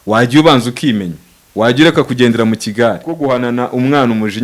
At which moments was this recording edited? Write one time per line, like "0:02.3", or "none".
0:03.2